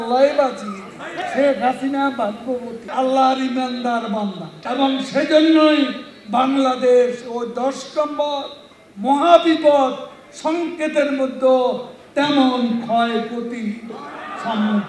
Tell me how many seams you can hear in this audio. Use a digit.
3